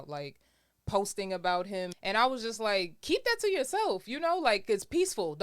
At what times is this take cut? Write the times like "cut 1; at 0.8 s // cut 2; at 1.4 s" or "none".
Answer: cut 1; at 1.9 s